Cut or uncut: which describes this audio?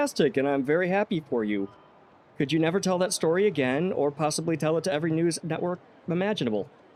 uncut